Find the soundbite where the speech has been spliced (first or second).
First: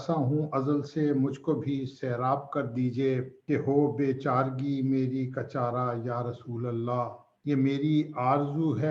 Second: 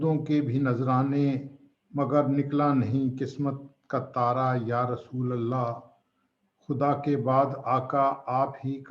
first